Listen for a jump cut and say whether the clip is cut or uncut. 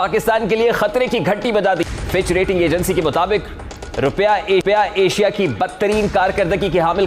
uncut